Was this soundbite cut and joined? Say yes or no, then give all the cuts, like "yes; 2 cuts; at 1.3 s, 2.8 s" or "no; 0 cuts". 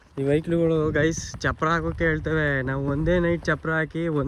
no; 0 cuts